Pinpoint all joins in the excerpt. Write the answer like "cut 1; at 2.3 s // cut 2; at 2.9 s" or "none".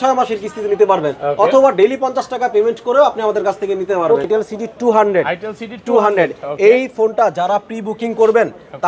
cut 1; at 4.3 s